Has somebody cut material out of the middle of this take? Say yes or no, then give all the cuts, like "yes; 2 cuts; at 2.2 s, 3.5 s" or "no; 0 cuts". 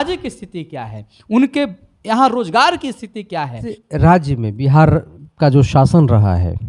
yes; 1 cut; at 3.7 s